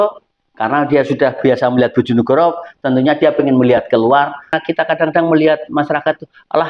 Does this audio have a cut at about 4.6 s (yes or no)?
yes